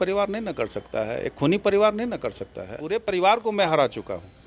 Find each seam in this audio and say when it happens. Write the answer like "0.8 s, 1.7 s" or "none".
3.1 s